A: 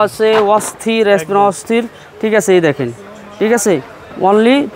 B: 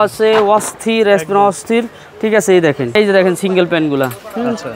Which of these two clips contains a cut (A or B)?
B